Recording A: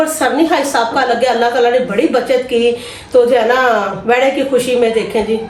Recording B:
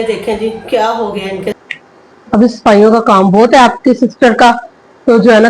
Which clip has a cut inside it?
B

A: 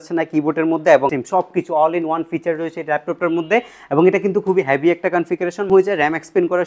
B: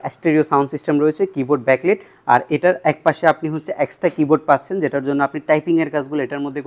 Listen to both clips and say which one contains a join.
A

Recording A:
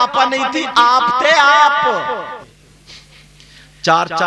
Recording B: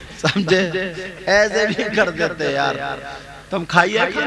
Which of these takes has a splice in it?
A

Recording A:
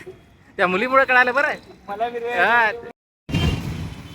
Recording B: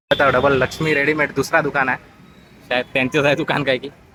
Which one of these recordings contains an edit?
A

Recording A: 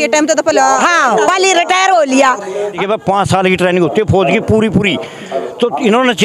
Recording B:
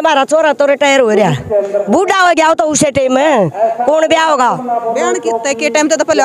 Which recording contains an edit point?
A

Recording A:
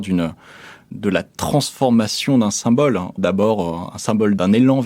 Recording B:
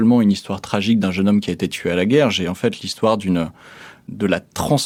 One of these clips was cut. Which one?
A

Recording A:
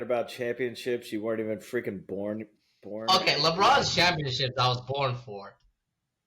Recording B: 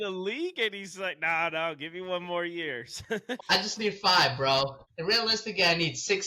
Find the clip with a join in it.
B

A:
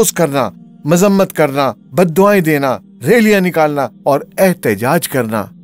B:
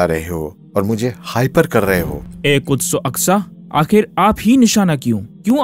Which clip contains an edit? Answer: B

